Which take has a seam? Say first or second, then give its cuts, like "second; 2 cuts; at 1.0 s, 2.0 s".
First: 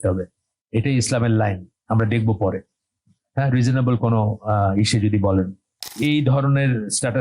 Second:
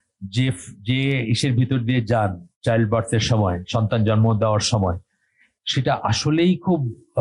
first; 1 cut; at 6.0 s